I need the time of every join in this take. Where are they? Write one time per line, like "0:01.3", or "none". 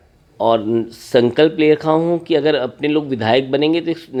none